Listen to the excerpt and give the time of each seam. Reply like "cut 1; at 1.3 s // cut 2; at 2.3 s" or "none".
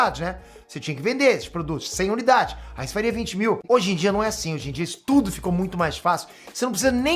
cut 1; at 3.6 s